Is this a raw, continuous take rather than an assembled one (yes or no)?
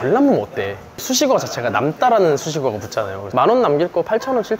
no